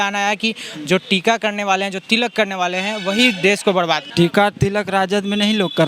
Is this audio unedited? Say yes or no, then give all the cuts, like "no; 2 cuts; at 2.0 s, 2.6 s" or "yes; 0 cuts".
no; 1 cut; at 4.1 s